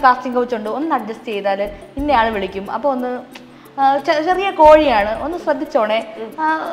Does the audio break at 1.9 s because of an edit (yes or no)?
no